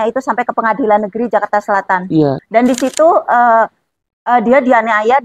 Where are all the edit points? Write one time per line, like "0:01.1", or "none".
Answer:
0:02.4